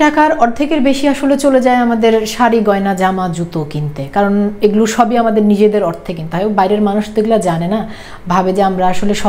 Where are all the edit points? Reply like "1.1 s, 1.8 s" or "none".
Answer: none